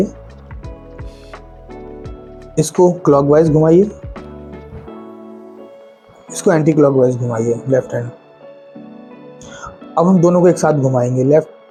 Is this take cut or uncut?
uncut